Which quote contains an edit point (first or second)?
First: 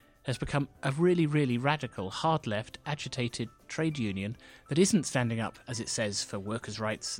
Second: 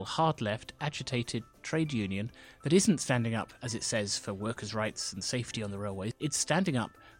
second